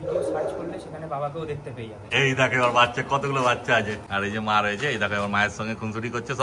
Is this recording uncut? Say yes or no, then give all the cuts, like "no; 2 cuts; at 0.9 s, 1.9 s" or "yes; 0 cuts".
no; 2 cuts; at 2.0 s, 4.0 s